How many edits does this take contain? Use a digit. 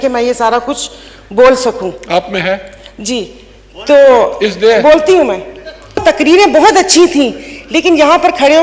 1